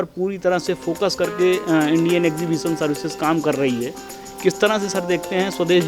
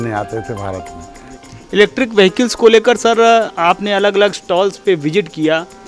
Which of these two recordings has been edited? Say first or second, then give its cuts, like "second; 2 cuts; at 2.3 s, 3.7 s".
second; 1 cut; at 1.0 s